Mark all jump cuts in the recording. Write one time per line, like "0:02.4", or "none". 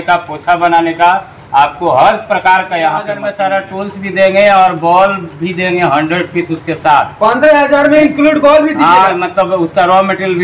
0:03.2